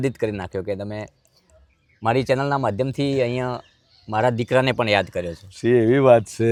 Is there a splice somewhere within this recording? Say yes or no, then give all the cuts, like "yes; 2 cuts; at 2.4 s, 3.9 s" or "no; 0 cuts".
no; 0 cuts